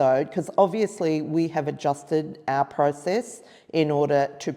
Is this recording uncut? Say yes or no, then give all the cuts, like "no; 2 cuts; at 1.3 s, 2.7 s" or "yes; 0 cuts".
yes; 0 cuts